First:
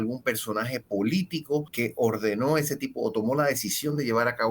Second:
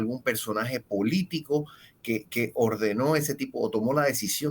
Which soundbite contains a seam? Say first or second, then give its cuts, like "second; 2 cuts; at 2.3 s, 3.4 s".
first; 1 cut; at 1.7 s